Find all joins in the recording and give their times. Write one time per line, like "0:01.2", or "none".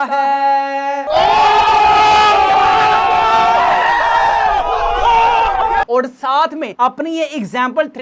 0:05.9